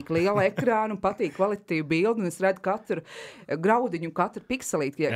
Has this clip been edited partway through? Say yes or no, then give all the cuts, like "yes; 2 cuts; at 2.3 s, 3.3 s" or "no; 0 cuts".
no; 0 cuts